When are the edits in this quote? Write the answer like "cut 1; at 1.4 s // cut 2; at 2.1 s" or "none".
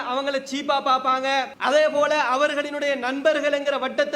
cut 1; at 1.5 s